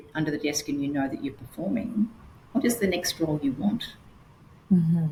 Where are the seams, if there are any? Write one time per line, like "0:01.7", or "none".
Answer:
none